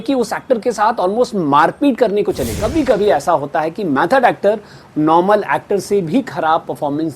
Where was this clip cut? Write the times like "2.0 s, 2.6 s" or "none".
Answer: 2.6 s